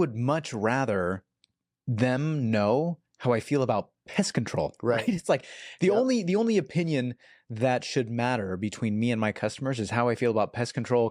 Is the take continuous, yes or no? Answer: yes